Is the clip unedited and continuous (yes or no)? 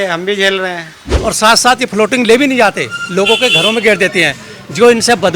no